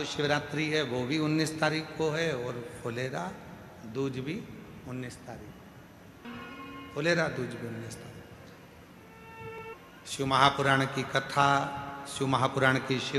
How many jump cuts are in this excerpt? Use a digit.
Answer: 2